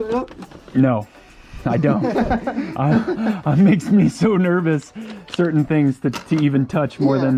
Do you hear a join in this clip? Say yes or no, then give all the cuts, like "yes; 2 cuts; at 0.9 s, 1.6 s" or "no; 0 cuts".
no; 0 cuts